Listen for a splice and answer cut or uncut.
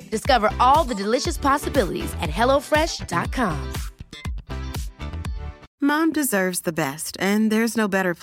uncut